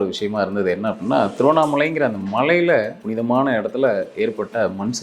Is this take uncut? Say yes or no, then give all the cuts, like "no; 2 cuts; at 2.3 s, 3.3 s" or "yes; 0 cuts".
no; 1 cut; at 3.0 s